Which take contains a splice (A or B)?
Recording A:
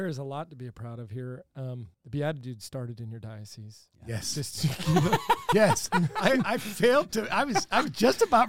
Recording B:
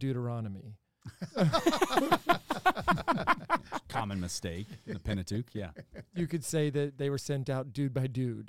A